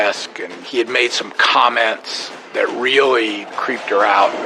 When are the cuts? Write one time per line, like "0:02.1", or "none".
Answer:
0:03.5